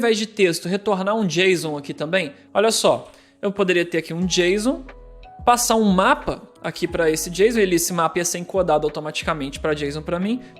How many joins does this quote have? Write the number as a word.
one